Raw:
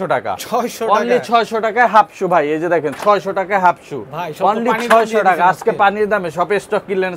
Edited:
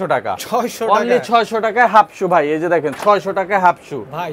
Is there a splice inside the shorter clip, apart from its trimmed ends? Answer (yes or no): no